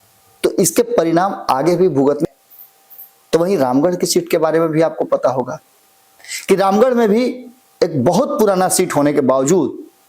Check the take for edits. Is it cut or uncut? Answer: cut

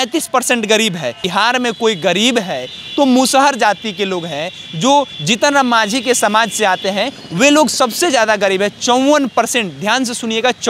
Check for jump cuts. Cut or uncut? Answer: cut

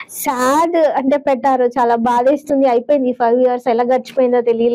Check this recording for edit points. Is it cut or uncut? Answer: uncut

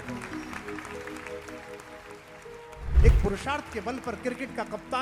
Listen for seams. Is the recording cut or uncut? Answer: cut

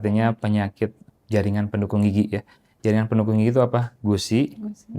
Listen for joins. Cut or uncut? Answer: cut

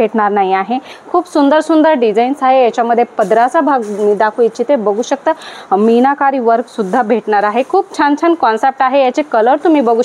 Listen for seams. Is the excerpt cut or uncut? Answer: cut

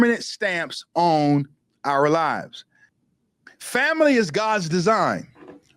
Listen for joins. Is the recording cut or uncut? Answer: cut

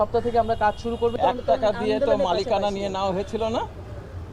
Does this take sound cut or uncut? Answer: uncut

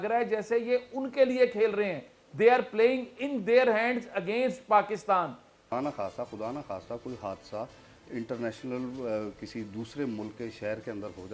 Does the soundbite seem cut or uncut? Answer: cut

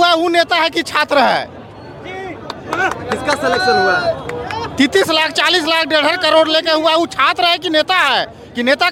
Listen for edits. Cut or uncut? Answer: uncut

